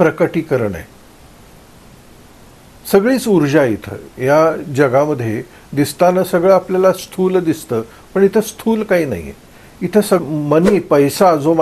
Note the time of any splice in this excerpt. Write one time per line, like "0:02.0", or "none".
0:10.2